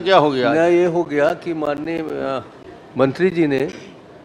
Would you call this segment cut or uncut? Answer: uncut